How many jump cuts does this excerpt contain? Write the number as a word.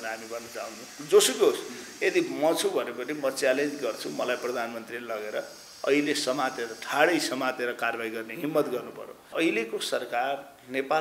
one